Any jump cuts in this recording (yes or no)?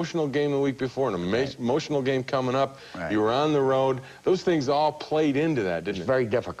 yes